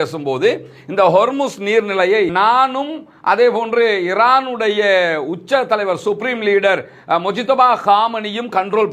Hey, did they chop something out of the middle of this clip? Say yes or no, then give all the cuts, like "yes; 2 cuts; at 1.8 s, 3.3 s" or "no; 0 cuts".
no; 0 cuts